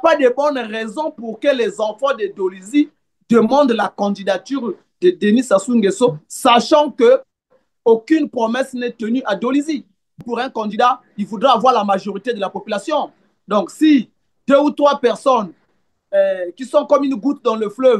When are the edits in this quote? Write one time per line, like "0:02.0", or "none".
0:10.2